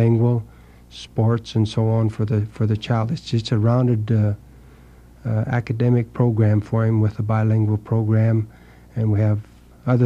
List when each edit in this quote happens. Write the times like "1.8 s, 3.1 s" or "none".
7.2 s